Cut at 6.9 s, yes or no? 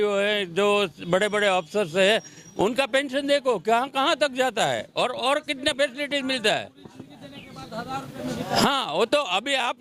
no